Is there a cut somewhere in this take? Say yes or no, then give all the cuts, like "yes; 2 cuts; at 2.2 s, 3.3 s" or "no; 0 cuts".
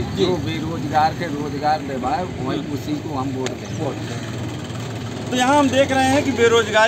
no; 0 cuts